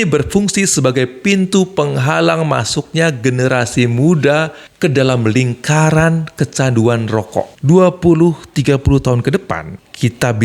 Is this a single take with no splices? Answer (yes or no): no